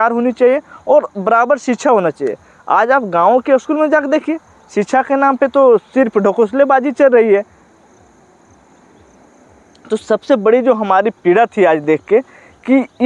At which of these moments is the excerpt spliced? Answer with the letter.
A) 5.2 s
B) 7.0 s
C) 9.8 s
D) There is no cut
D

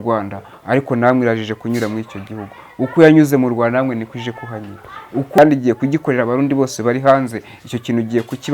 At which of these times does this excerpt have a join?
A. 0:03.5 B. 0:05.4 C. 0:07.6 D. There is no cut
B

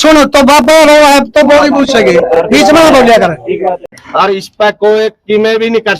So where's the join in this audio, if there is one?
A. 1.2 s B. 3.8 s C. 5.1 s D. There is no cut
B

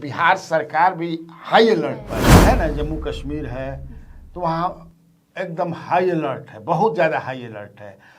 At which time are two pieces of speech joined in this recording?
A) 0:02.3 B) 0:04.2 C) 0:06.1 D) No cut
A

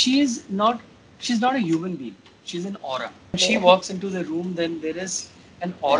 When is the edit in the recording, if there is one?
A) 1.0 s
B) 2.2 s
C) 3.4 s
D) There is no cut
C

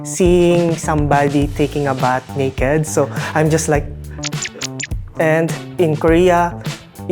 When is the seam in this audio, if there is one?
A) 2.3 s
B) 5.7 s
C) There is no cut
B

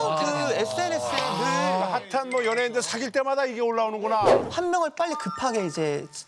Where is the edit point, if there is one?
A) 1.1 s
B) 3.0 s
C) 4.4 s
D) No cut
C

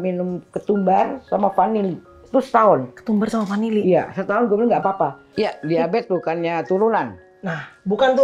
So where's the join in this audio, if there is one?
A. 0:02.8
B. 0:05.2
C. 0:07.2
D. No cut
B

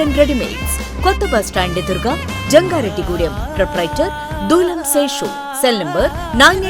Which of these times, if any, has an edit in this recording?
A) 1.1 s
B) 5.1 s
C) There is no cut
C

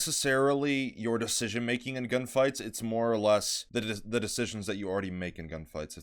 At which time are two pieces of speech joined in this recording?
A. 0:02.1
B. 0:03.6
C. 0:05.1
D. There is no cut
B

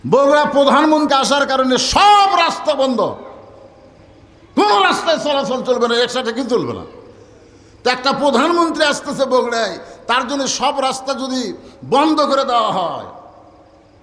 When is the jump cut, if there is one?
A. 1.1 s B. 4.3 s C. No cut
A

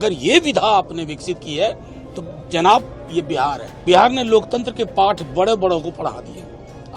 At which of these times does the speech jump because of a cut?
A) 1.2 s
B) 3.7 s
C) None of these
B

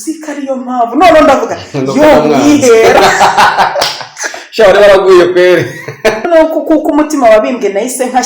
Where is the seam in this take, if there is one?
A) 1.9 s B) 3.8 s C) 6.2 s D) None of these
C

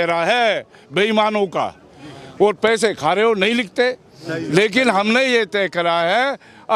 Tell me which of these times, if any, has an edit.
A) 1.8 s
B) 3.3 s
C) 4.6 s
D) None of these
D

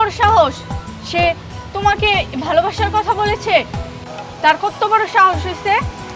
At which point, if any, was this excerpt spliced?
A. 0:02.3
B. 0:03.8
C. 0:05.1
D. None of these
D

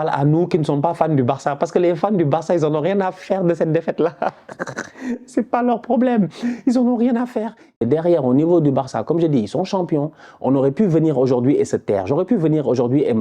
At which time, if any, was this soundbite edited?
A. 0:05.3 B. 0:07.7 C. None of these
B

